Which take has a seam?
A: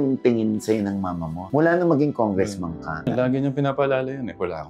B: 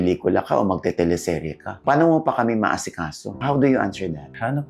A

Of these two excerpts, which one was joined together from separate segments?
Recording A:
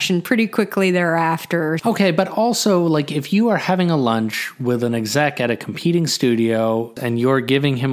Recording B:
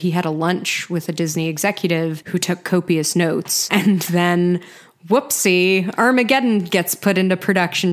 A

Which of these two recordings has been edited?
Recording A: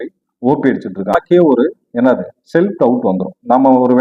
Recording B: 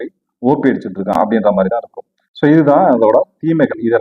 A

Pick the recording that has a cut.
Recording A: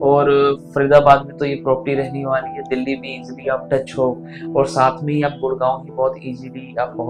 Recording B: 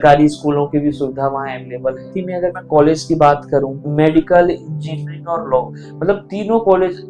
B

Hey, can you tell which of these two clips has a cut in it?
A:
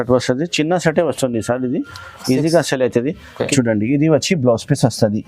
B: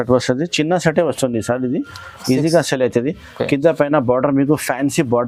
A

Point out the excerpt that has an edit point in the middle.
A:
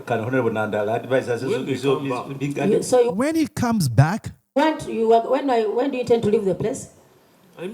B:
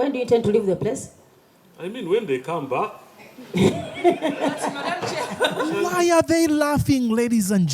A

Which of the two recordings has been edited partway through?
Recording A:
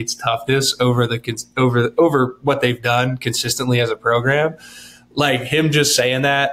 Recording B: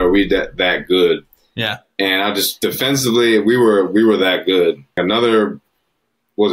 B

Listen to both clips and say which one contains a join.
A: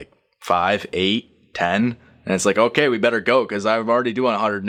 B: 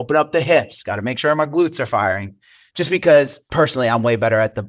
B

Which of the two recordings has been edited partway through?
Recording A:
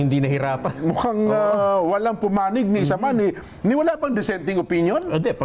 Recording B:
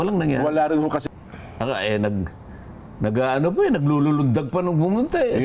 B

